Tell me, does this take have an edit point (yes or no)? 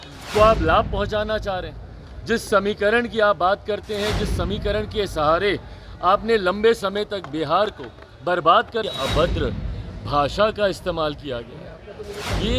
yes